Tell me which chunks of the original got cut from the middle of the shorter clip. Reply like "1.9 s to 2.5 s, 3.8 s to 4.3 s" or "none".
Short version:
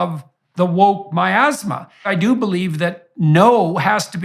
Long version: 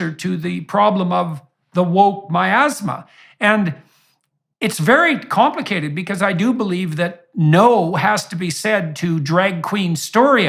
3.2 s to 6.2 s